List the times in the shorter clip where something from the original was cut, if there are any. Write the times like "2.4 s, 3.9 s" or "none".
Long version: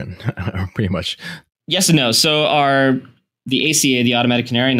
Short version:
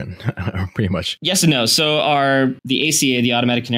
1.1 s, 2.6 s